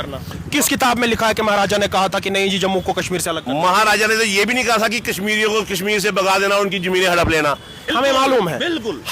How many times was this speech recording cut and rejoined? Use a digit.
1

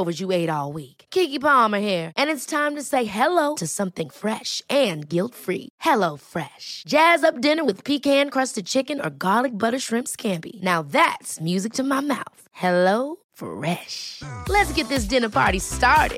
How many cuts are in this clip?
0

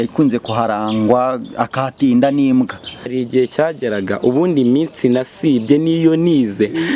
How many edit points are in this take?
1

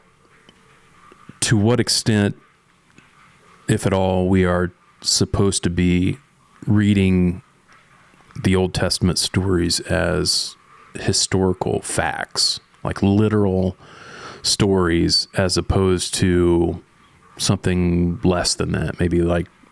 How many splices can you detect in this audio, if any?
0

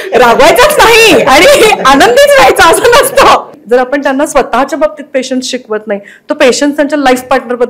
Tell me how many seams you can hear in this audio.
1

